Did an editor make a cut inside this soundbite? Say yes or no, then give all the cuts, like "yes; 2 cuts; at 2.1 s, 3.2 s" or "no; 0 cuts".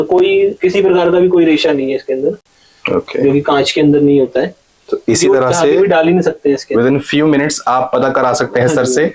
no; 0 cuts